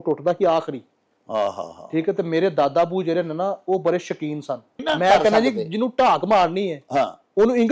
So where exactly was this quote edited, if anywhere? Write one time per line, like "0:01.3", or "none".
0:04.7